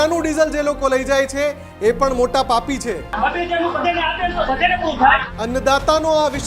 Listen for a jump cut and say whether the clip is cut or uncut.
cut